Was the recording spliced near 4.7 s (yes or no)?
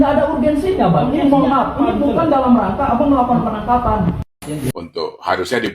yes